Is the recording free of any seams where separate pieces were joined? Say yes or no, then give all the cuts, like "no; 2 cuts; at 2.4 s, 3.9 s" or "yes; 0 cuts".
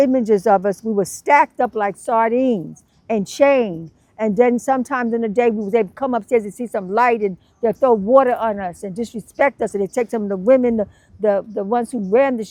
yes; 0 cuts